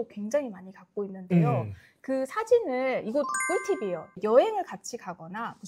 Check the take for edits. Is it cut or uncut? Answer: cut